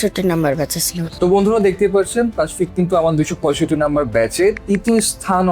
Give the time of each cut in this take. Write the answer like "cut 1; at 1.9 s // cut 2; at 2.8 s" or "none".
cut 1; at 1.1 s